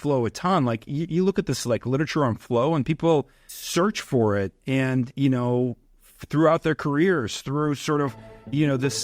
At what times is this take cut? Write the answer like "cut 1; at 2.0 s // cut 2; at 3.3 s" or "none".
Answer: none